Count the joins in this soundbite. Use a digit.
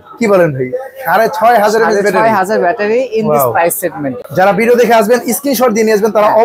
1